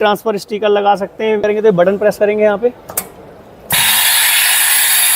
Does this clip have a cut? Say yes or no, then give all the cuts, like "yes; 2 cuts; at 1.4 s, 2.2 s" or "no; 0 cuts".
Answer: yes; 1 cut; at 1.4 s